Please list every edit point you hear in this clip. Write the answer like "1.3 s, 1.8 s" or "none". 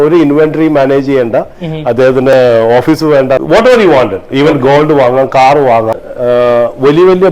3.4 s, 5.9 s